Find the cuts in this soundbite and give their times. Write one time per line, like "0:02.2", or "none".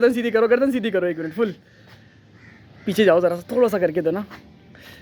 none